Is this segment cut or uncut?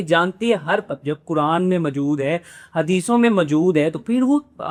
uncut